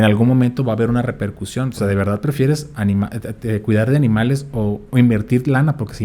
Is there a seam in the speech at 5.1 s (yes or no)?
no